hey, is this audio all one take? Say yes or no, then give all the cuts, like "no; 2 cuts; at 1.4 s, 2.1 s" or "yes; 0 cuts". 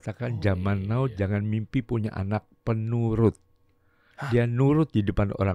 yes; 0 cuts